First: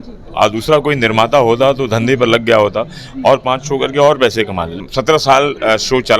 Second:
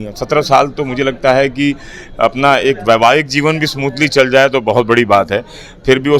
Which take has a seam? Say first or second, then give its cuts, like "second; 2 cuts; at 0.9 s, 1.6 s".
first; 1 cut; at 4.8 s